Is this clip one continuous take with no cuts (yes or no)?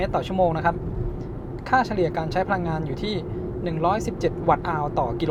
yes